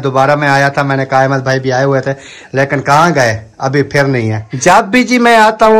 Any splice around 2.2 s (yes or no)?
no